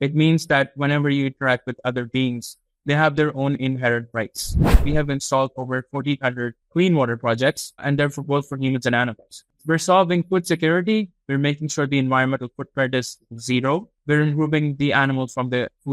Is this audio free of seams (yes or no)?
no